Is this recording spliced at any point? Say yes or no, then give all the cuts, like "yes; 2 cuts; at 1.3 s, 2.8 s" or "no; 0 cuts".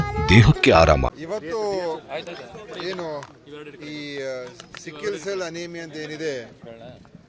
yes; 1 cut; at 1.2 s